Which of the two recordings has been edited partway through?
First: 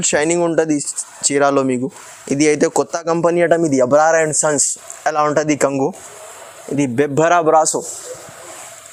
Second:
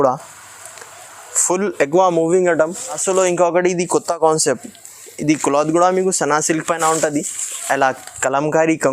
second; 1 cut; at 3.0 s

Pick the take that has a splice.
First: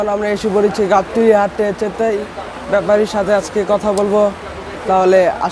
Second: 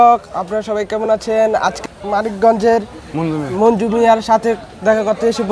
second; 1 cut; at 2.1 s

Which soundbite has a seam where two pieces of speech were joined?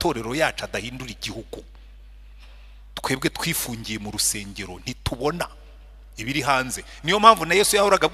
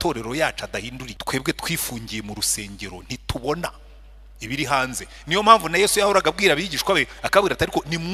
second; 1 cut; at 1.1 s

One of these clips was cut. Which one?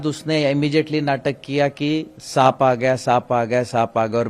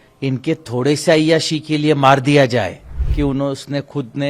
second; 1 cut; at 3.0 s

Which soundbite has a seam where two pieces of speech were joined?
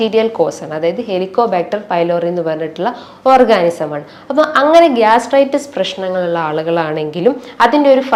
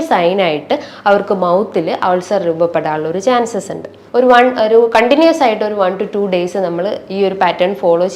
second; 1 cut; at 4.0 s

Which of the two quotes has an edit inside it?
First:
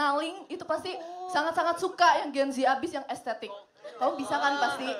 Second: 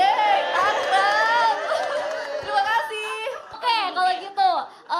second; 1 cut; at 3.5 s

